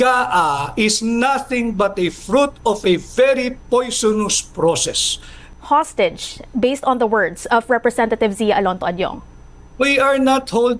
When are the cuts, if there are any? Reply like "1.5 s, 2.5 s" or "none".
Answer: 5.4 s